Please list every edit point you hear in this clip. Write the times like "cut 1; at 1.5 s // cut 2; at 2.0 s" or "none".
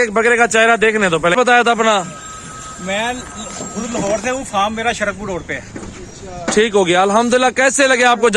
cut 1; at 1.3 s

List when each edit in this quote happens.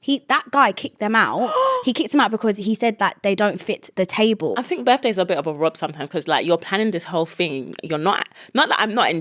cut 1; at 4.5 s

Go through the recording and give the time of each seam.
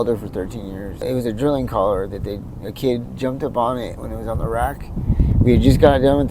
cut 1; at 1.0 s

